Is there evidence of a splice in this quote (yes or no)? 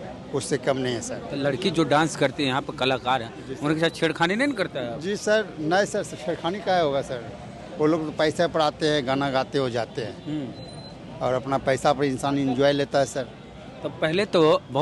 no